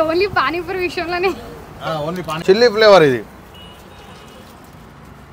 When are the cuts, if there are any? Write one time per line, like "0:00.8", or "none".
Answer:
0:02.4